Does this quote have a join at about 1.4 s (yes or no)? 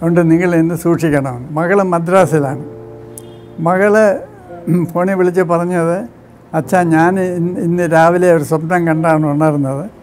yes